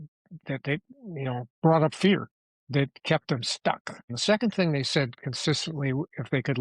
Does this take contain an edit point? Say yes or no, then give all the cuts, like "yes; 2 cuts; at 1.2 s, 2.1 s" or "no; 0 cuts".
yes; 1 cut; at 4.0 s